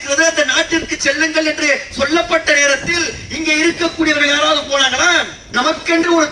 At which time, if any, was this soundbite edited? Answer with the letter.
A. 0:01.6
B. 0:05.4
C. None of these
B